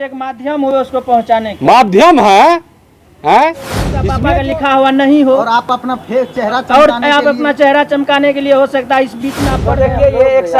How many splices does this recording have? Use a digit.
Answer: 2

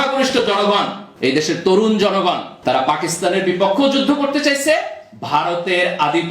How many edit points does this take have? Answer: 2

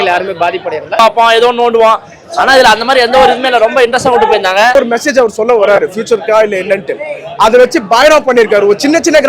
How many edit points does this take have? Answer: 2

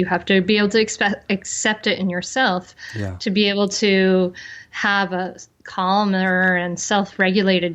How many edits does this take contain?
0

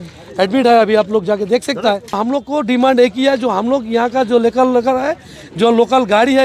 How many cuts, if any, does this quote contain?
1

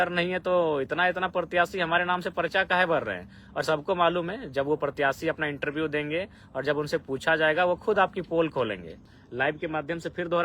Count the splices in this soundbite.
1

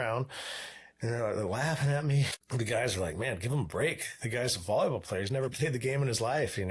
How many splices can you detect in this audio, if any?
1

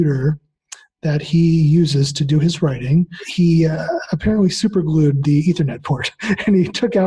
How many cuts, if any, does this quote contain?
1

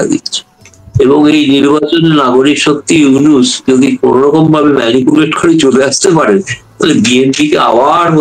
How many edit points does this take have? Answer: 0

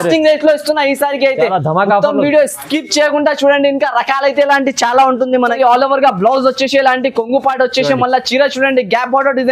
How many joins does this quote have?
1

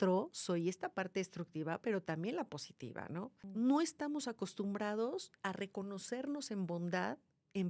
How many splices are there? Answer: 1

